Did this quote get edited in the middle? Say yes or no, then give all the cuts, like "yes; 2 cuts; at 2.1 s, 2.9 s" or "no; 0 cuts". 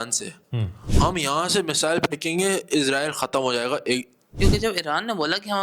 yes; 1 cut; at 4.4 s